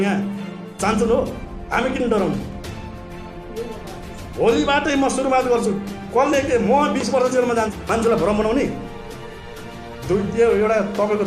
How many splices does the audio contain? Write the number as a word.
one